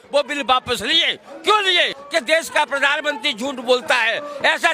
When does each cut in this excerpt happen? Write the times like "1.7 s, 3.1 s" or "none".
2.0 s

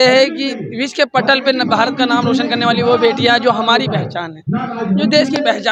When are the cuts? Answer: none

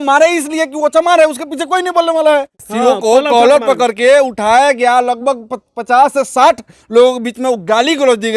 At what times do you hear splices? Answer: 2.6 s

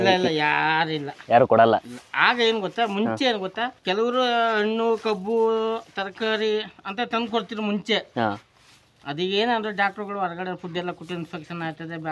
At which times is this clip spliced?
none

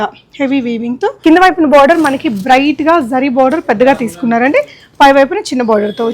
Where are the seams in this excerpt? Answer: 1.2 s

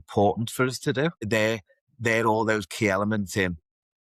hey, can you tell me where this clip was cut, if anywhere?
1.2 s

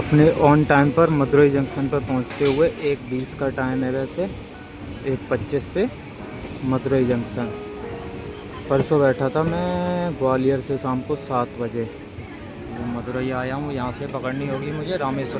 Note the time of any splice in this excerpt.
none

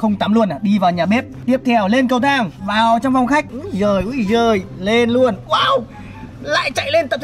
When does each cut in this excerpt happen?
3.5 s

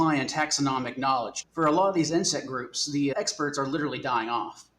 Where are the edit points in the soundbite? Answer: 1.4 s, 3.1 s

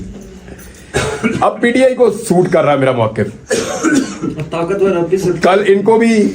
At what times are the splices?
none

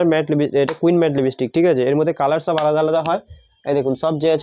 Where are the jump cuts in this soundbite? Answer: none

